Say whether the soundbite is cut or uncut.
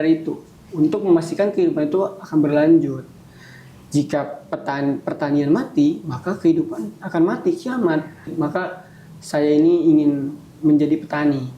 cut